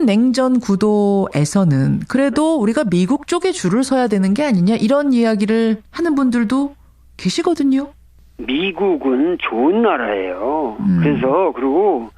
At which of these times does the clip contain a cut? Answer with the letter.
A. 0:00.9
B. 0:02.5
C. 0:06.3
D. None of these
A